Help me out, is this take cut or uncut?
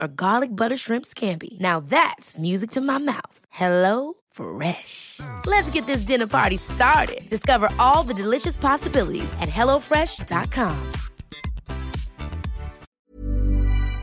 cut